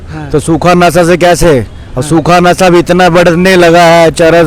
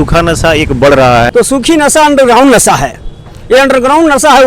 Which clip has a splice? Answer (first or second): second